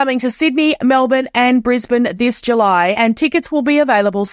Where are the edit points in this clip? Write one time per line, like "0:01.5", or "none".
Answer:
none